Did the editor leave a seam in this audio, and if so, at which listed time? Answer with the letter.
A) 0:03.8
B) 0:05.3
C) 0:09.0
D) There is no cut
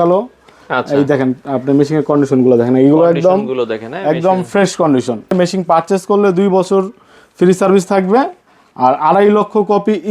B